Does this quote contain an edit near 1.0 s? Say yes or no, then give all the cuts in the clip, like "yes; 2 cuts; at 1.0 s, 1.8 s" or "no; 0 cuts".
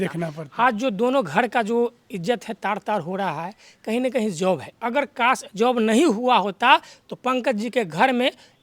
no; 0 cuts